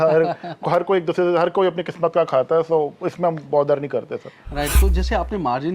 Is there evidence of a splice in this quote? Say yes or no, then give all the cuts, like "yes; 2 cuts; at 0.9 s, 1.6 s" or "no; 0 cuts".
yes; 1 cut; at 4.7 s